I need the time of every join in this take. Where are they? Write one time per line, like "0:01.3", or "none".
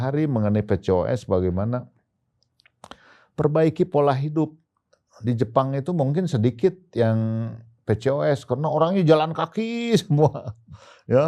none